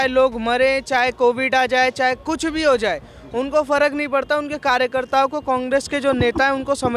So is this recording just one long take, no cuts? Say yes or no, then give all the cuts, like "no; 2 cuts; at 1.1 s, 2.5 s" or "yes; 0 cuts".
yes; 0 cuts